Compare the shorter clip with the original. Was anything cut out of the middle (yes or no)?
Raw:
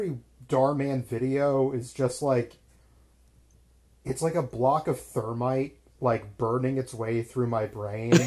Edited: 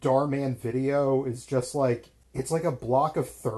yes